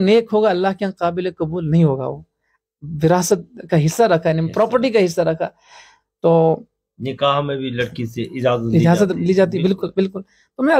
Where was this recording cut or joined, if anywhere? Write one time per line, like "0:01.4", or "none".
none